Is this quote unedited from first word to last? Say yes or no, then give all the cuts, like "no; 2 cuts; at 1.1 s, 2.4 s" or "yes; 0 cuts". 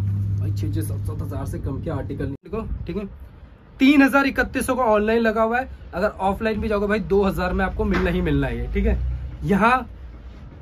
no; 1 cut; at 2.5 s